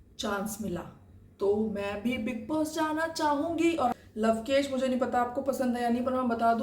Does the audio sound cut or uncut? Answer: cut